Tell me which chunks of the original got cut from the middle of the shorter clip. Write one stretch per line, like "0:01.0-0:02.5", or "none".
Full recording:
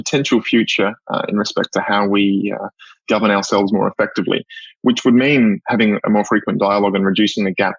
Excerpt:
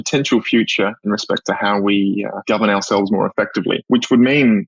0:01.0-0:01.3
0:02.6-0:03.0
0:04.4-0:04.8